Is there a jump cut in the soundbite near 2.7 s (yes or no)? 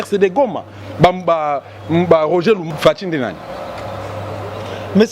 yes